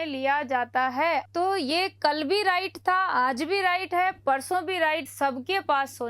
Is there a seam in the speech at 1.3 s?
yes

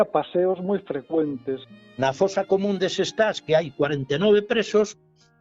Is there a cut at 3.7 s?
no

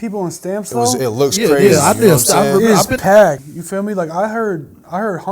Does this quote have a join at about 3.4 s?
yes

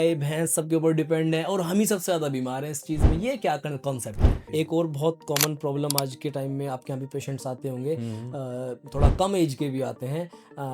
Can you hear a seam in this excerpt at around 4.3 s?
yes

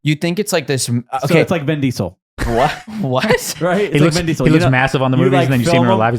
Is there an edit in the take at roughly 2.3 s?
yes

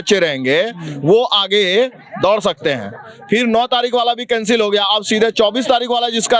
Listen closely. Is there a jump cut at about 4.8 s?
no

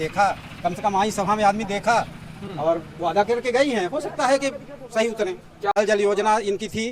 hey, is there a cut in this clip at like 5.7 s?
yes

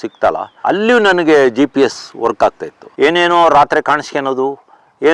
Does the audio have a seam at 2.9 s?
yes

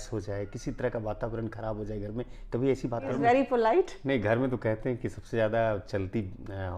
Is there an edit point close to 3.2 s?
yes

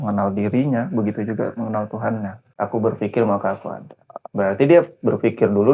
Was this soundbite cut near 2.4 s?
yes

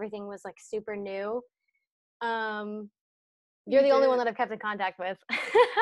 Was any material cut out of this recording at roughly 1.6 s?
no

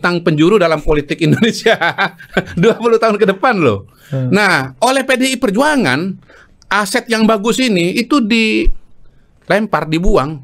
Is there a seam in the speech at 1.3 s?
no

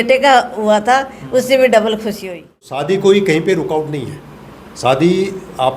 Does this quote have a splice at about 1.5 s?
no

